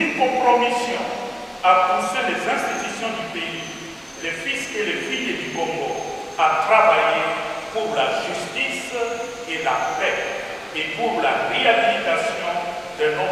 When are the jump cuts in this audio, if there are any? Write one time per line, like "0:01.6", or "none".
none